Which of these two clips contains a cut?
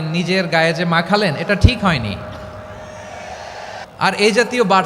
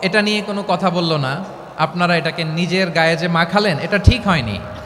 first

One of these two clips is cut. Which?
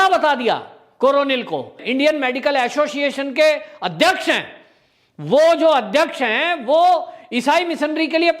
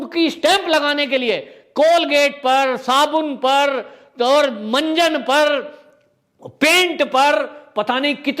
first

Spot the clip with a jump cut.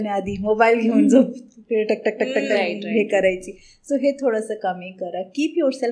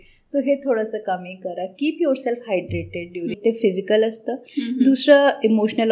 second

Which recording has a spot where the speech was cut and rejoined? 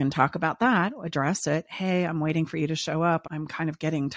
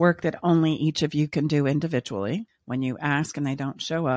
second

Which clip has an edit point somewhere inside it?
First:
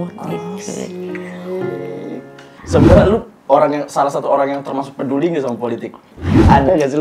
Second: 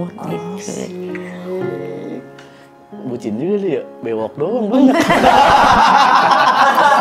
first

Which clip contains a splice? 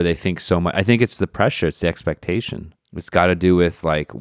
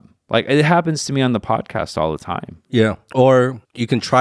second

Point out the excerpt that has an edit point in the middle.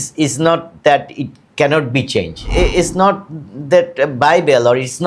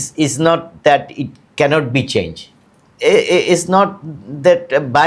first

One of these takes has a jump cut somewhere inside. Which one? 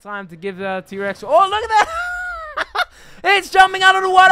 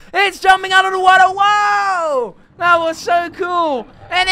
second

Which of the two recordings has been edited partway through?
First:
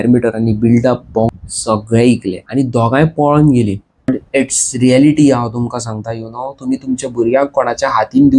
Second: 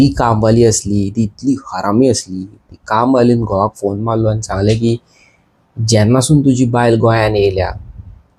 first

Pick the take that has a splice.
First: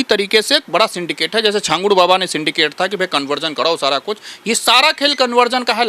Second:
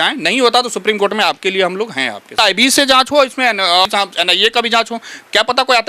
second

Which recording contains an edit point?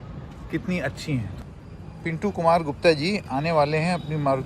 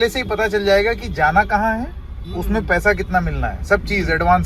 first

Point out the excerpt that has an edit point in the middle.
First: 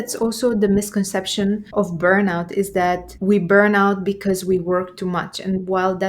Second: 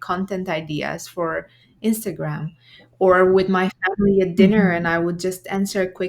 first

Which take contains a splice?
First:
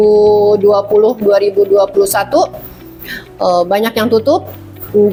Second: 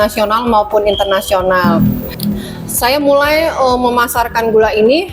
second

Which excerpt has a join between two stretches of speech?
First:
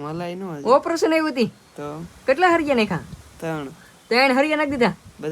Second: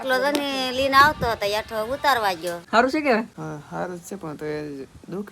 second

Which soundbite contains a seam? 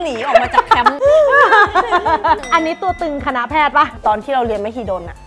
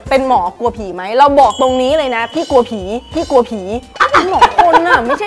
first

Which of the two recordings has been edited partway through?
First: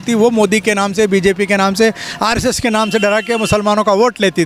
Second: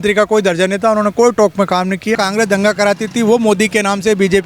second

